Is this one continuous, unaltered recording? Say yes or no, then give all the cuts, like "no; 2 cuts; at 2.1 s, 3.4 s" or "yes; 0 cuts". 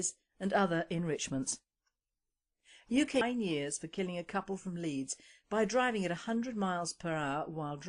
yes; 0 cuts